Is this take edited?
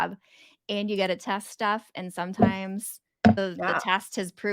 yes; 1 cut; at 3.4 s

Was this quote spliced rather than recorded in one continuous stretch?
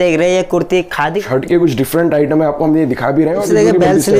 yes; 2 cuts; at 1.2 s, 3.4 s

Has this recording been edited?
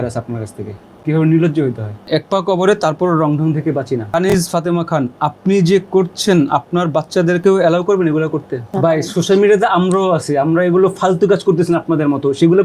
yes; 3 cuts; at 2.1 s, 4.1 s, 8.7 s

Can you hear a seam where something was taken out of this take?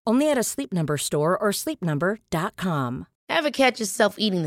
yes; 1 cut; at 3.1 s

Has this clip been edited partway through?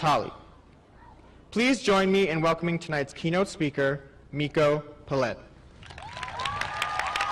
yes; 1 cut; at 3.0 s

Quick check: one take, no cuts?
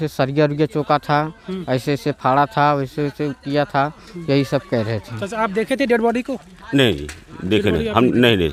yes; 0 cuts

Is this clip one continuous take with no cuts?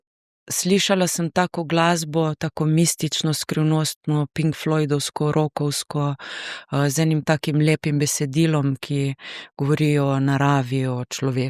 yes; 0 cuts

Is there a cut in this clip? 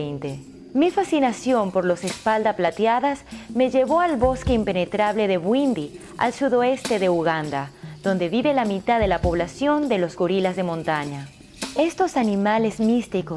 yes; 1 cut; at 2.4 s

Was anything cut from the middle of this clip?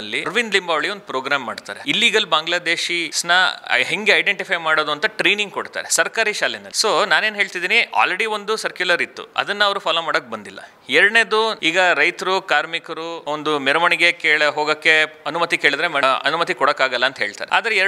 no; 0 cuts

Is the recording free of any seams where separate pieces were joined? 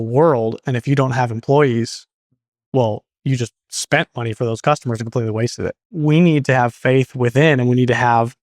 no; 1 cut; at 5.9 s

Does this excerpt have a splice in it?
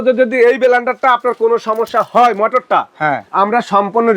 yes; 1 cut; at 3.2 s

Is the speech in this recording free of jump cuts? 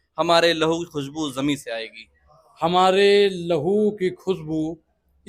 yes; 0 cuts

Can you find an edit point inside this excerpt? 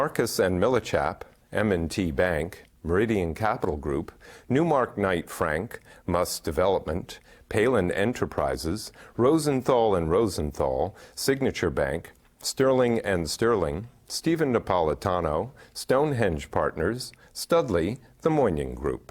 yes; 1 cut; at 18.1 s

